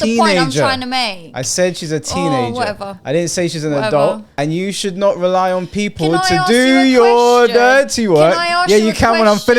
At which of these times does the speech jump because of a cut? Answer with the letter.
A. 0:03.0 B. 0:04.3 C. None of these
B